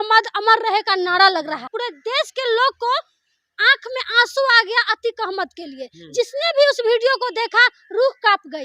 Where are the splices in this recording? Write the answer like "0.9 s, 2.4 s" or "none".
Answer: 1.8 s